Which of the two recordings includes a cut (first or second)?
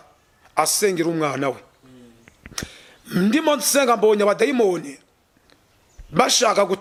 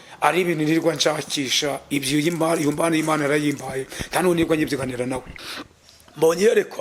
second